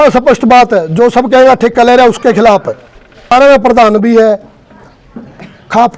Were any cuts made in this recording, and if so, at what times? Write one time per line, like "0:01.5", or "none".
0:03.3